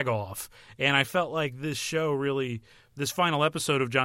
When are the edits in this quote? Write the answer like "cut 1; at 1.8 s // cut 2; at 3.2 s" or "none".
none